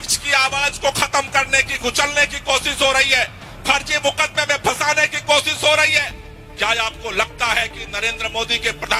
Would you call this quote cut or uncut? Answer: uncut